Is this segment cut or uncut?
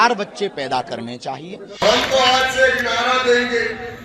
cut